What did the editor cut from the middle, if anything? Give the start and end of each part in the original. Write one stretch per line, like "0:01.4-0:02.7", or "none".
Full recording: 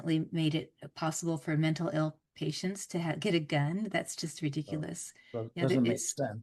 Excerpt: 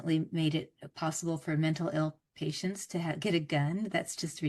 none